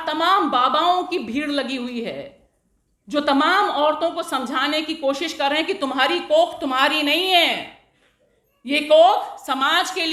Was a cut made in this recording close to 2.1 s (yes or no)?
no